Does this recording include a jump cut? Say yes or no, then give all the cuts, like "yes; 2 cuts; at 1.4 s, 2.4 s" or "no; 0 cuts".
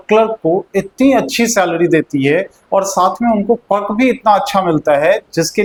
no; 0 cuts